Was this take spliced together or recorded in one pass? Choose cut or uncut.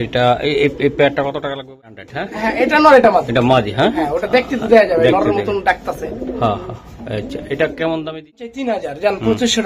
cut